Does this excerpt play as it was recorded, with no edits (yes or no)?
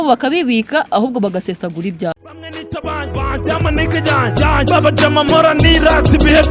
no